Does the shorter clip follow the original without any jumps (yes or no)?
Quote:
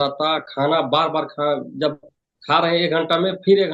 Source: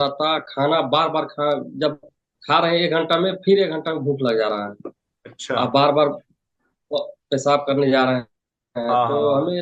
yes